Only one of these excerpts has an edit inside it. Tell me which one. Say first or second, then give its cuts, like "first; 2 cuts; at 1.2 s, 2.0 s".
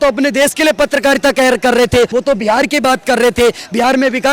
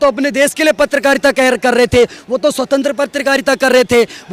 first; 1 cut; at 2.1 s